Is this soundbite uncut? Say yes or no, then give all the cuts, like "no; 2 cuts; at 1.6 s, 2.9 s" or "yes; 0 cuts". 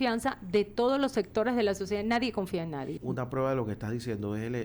no; 1 cut; at 2.9 s